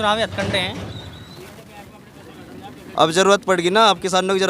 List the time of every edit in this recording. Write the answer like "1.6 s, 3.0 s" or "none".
1.3 s